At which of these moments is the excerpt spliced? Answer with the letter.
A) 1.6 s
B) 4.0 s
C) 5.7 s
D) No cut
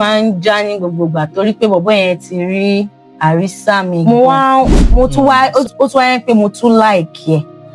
B